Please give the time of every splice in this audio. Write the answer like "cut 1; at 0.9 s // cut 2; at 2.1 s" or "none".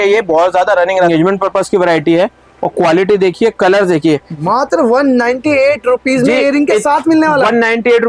cut 1; at 1.1 s // cut 2; at 4.3 s